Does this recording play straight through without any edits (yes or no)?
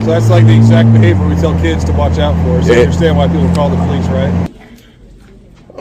no